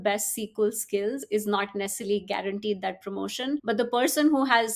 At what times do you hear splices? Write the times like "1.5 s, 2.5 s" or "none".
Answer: 1.2 s, 3.6 s